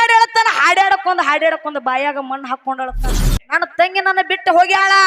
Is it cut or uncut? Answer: cut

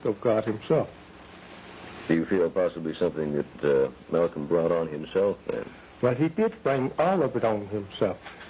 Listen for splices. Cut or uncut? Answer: uncut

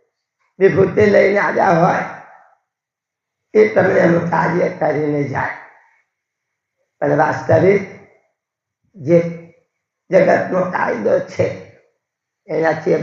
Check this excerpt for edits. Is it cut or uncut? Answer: uncut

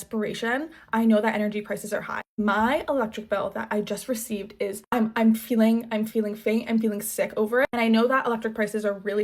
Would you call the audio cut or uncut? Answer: uncut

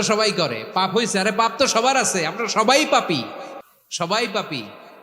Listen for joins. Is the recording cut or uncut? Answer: uncut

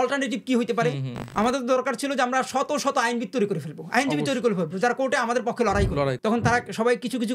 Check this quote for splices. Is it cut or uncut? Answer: cut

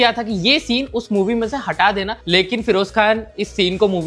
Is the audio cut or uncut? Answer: uncut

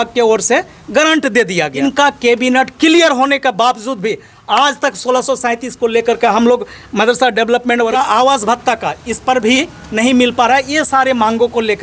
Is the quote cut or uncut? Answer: cut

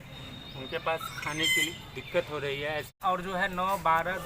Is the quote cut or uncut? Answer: cut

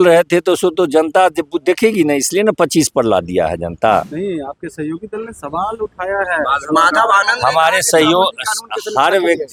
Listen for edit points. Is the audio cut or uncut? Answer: uncut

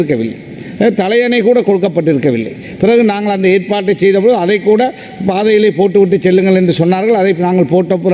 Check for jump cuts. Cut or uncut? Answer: uncut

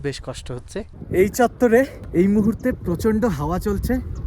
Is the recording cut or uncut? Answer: cut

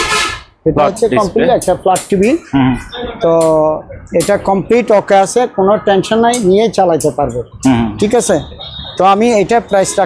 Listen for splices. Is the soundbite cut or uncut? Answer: uncut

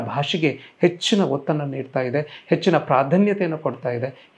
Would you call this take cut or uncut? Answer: uncut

